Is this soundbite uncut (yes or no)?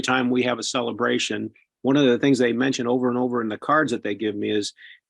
yes